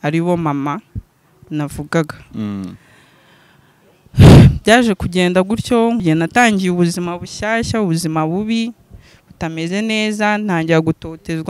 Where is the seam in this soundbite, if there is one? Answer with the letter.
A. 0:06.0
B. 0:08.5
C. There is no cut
A